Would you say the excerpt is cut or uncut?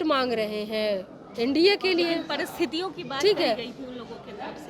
uncut